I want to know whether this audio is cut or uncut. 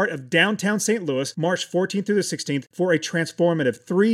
uncut